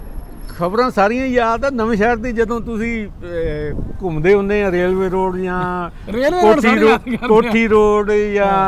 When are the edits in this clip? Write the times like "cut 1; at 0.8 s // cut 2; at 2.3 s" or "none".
none